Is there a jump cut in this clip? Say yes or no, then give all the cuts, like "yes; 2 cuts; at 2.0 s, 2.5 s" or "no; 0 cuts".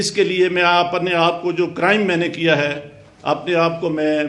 no; 0 cuts